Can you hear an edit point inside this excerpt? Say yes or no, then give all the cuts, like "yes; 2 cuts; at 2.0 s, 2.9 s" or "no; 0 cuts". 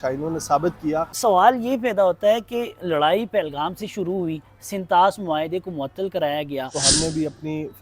yes; 2 cuts; at 1.1 s, 6.8 s